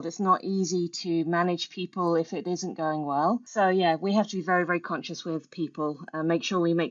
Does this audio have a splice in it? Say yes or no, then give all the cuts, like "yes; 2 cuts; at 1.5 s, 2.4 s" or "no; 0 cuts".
yes; 1 cut; at 3.5 s